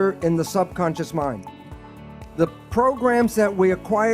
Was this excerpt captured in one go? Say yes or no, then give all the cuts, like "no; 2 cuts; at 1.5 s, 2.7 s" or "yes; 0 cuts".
no; 1 cut; at 2.1 s